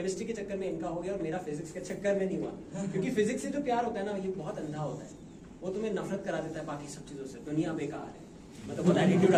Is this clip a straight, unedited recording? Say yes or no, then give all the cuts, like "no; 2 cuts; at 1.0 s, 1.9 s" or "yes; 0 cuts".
yes; 0 cuts